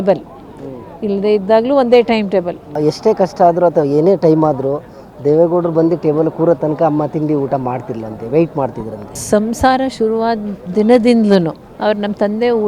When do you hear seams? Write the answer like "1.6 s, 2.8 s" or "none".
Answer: 2.6 s, 9.1 s, 11.6 s